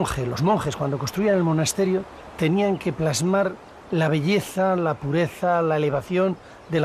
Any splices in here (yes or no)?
no